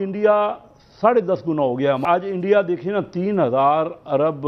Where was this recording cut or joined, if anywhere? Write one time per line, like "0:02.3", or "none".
0:02.0